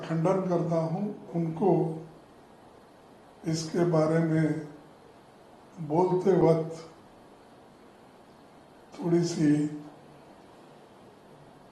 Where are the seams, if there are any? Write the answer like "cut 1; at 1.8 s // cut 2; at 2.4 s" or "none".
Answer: cut 1; at 1.3 s